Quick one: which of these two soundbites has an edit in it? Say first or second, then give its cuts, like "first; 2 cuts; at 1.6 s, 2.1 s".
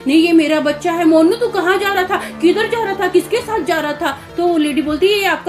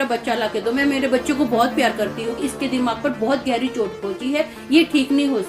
second; 1 cut; at 2.5 s